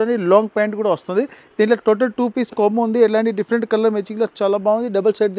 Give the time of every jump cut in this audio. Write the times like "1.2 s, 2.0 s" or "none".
none